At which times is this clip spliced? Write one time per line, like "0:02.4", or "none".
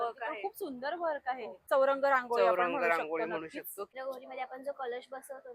0:01.7
0:03.9